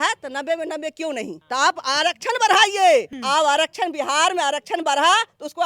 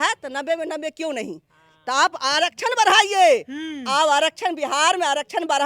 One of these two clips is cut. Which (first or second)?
first